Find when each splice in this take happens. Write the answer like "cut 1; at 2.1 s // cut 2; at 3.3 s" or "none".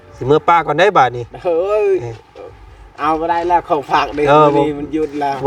none

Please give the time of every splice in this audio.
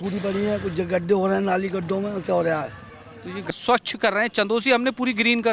cut 1; at 3.5 s

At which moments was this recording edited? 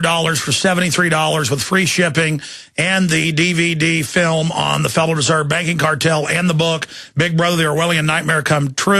cut 1; at 3.7 s

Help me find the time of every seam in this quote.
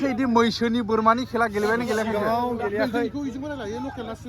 none

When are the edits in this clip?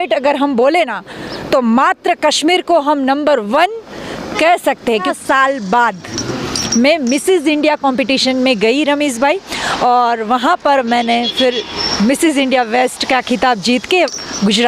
cut 1; at 5.1 s

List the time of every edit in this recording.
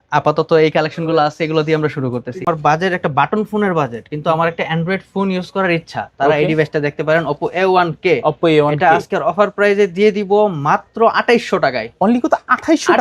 cut 1; at 2.4 s

